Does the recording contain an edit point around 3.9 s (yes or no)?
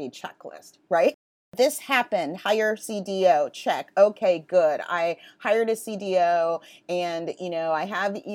no